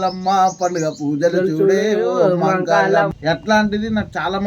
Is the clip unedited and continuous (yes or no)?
no